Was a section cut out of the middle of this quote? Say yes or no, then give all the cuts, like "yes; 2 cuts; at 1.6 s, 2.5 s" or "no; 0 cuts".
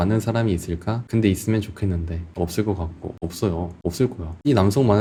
no; 0 cuts